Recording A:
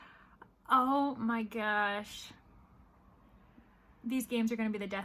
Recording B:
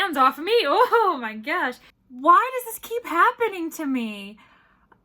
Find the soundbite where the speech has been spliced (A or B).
B